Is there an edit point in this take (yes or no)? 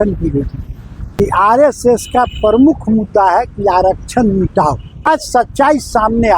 yes